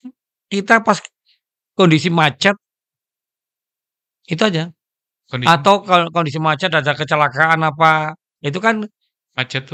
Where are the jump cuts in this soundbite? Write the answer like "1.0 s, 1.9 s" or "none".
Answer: none